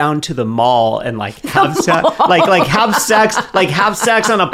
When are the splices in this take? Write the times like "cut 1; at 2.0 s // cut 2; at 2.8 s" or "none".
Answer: none